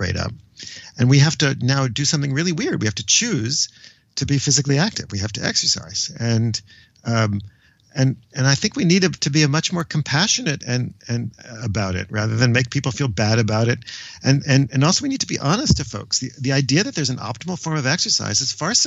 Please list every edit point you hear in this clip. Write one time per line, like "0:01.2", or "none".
none